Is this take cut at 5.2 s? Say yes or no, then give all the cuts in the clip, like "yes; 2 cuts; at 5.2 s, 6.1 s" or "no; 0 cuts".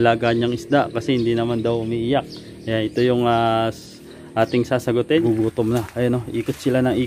yes; 1 cut; at 5.2 s